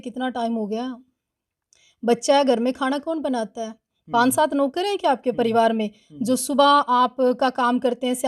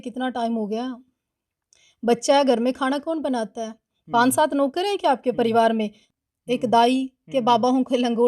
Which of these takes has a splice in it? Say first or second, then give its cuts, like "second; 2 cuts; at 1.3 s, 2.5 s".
second; 1 cut; at 6.1 s